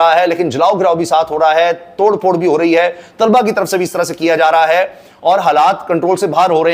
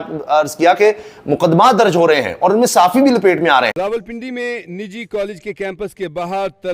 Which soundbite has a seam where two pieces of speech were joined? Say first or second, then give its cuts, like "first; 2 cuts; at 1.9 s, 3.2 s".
second; 1 cut; at 3.7 s